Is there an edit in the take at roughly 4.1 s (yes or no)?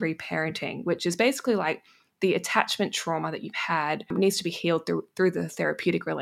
yes